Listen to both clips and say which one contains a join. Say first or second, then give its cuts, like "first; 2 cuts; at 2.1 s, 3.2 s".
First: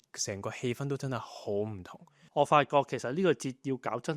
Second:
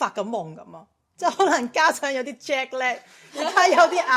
first; 1 cut; at 2.2 s